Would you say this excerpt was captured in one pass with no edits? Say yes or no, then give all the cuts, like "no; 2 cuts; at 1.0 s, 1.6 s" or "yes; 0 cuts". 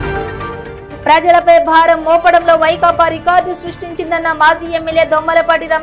yes; 0 cuts